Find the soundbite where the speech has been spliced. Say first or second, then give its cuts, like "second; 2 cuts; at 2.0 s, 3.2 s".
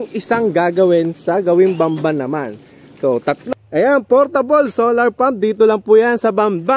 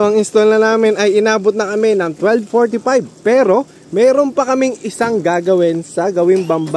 first; 1 cut; at 3.4 s